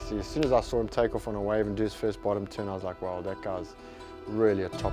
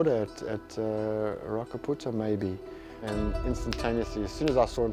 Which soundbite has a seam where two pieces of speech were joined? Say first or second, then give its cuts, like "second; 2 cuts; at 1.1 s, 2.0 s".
second; 1 cut; at 3.1 s